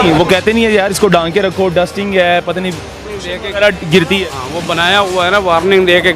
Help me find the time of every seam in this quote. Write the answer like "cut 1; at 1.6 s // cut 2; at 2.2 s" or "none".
none